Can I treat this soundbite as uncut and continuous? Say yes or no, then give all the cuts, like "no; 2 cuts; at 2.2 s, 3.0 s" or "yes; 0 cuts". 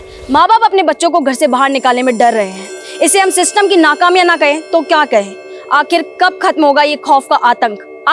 yes; 0 cuts